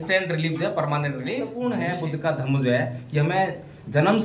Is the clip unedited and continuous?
no; 1 cut; at 1.5 s

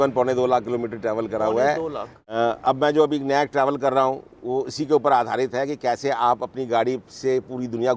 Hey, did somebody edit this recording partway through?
yes; 1 cut; at 2.1 s

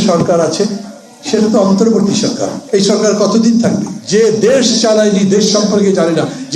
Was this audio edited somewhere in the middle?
yes; 1 cut; at 3.9 s

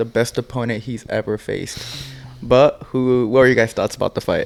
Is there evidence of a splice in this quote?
no; 0 cuts

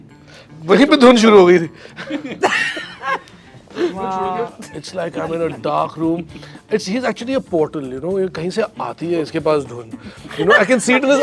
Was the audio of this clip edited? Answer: yes; 1 cut; at 4.6 s

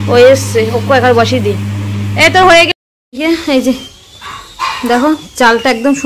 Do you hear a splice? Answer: yes; 1 cut; at 2.7 s

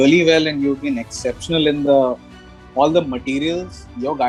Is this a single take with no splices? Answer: yes; 0 cuts

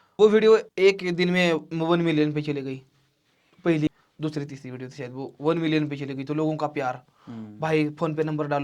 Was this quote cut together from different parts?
no; 0 cuts

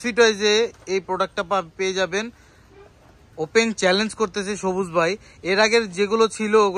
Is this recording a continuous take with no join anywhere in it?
yes; 0 cuts

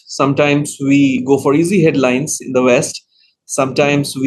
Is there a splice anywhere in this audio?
yes; 1 cut; at 1.2 s

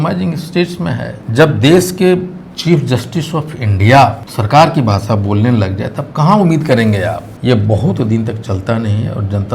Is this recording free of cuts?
no; 3 cuts; at 1.1 s, 4.3 s, 7.3 s

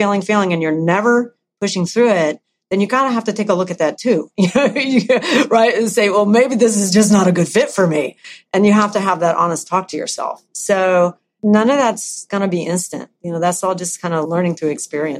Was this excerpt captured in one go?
no; 3 cuts; at 11.4 s, 12.3 s, 14.2 s

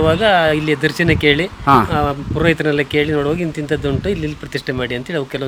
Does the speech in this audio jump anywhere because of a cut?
no; 0 cuts

